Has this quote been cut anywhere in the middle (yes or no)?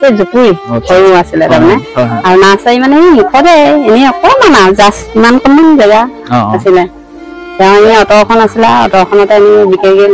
no